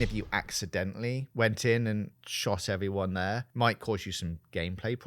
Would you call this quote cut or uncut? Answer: cut